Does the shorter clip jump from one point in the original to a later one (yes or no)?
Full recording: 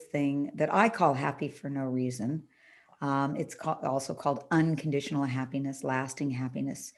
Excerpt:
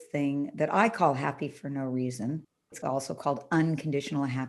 yes